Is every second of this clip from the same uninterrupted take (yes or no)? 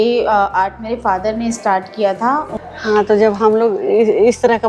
no